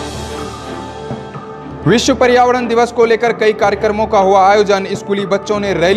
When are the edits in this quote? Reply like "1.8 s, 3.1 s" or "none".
1.1 s

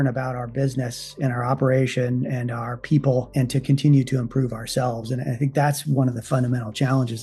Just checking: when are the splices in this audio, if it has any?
none

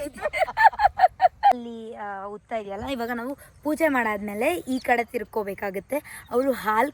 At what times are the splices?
1.7 s

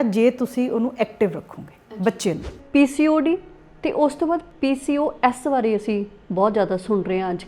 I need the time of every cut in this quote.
2.5 s, 4.5 s

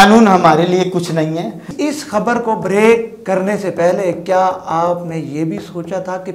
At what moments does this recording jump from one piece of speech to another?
1.7 s

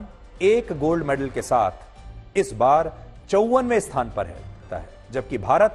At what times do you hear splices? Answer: 4.6 s

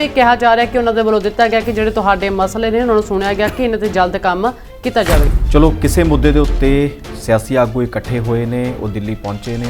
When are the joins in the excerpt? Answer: 5.3 s

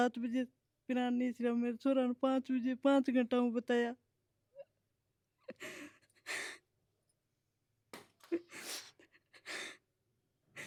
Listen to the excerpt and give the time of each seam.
none

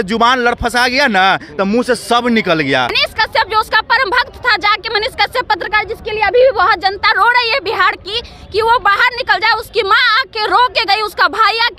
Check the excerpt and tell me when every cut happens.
3.0 s

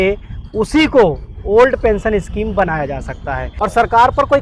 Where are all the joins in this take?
3.5 s

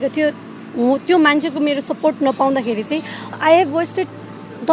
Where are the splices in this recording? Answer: 3.3 s

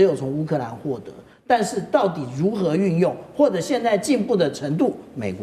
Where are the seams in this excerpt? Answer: none

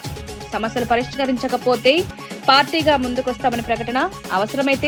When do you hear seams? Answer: none

